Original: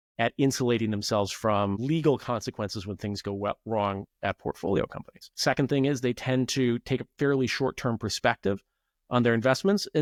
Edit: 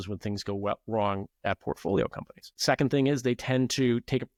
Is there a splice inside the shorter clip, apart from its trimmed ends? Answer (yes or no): no